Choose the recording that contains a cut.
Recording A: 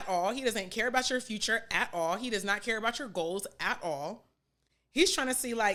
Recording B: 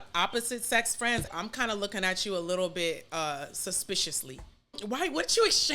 B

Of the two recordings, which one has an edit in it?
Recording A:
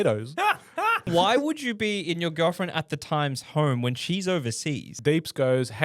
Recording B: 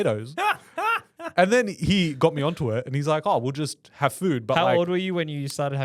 A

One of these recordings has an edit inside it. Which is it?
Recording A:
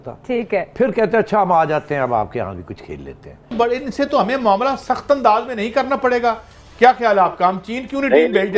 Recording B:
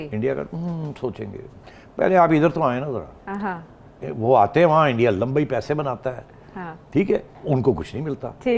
A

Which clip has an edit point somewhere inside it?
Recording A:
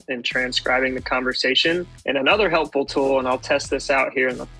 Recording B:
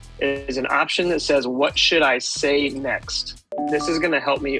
B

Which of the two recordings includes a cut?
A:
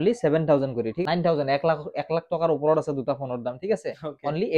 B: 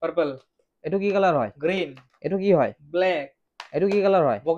A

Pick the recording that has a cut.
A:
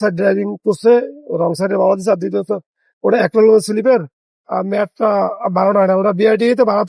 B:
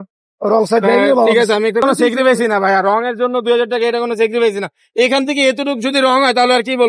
B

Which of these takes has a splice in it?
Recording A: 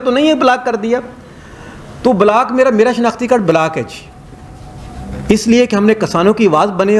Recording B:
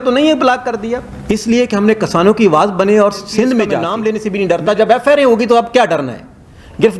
B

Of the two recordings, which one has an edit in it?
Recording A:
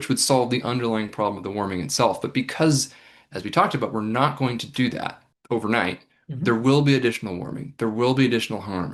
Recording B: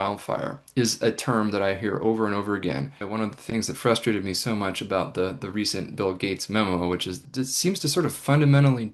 B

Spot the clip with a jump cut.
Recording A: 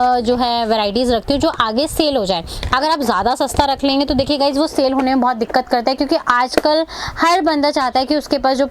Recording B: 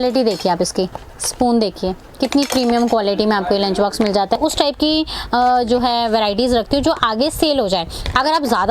B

